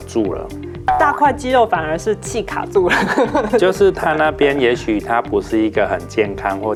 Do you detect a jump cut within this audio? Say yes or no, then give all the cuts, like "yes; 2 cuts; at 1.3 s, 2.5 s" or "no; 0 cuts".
no; 0 cuts